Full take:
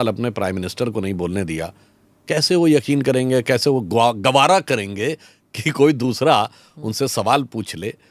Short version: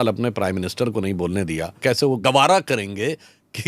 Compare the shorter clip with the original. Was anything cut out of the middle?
yes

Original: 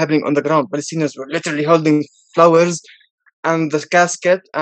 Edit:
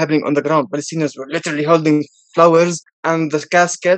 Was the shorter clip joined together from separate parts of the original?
yes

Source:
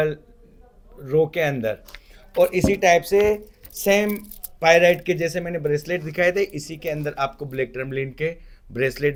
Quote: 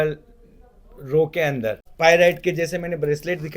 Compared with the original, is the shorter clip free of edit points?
no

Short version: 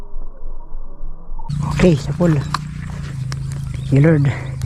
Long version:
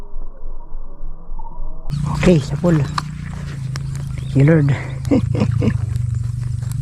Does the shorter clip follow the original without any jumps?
no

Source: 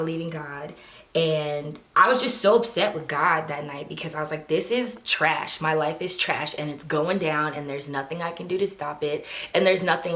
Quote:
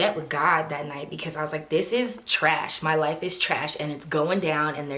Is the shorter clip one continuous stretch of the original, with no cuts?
yes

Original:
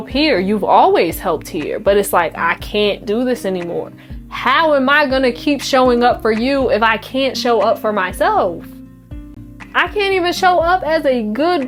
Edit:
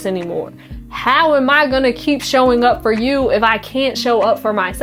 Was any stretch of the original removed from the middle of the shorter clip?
no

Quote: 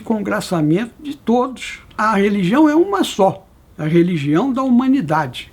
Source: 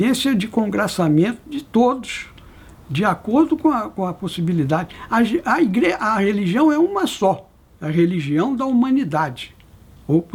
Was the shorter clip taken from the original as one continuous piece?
no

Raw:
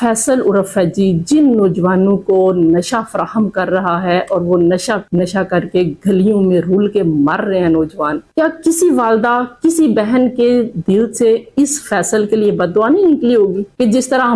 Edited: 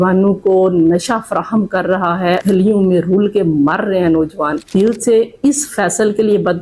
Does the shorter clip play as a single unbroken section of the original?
no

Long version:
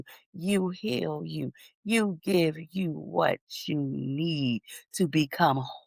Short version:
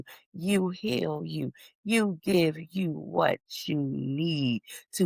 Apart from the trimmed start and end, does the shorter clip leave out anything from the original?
no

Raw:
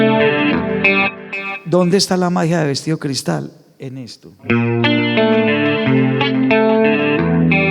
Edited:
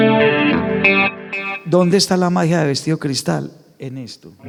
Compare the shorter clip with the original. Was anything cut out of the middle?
no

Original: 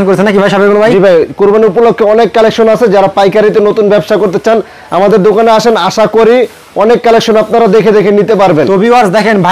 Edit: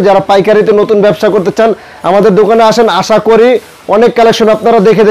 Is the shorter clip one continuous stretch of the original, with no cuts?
yes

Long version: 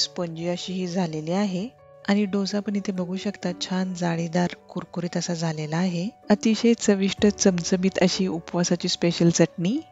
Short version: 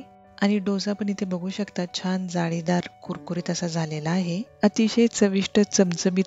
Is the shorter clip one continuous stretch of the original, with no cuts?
yes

